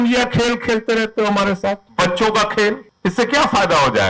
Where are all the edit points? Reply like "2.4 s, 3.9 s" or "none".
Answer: 1.8 s, 2.9 s

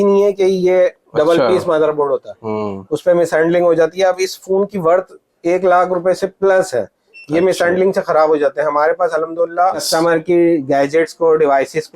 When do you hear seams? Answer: 1.0 s, 9.8 s

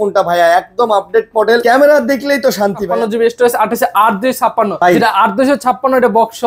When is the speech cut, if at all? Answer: 1.6 s, 2.8 s, 4.7 s

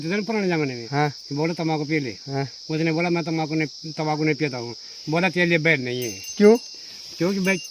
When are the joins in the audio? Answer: none

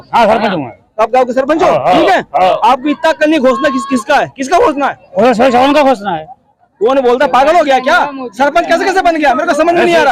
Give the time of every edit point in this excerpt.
none

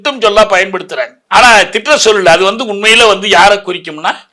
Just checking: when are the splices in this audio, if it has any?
1.2 s

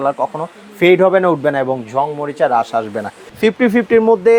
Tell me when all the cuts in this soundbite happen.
3.3 s

